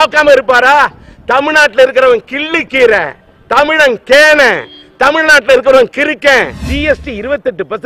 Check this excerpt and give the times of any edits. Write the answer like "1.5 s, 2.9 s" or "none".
6.6 s